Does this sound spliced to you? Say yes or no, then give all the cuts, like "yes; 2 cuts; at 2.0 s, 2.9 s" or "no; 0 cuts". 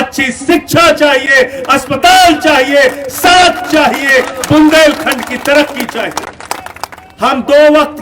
yes; 1 cut; at 7.0 s